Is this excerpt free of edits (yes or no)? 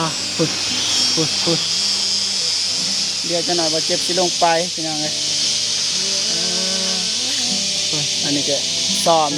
yes